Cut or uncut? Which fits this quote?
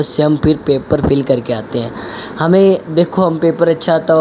uncut